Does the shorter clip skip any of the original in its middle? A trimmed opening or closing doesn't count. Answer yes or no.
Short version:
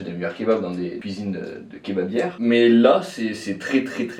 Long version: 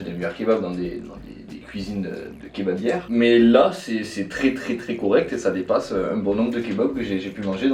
yes